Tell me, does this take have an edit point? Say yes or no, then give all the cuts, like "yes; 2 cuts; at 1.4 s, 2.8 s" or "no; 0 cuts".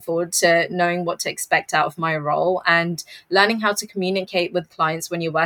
no; 0 cuts